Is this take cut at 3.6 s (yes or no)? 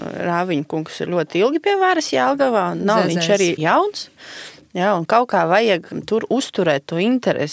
yes